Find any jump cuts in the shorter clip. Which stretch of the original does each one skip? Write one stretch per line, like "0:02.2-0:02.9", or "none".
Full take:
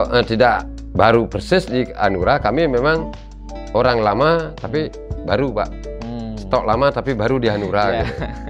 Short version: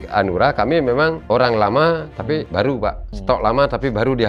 0:03.1-0:03.6
0:05.1-0:05.9